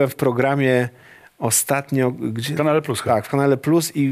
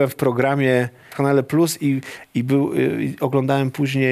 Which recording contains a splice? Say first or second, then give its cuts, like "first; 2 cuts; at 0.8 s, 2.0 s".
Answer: second; 1 cut; at 1.1 s